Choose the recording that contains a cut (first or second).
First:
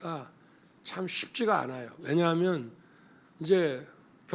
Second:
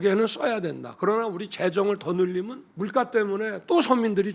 second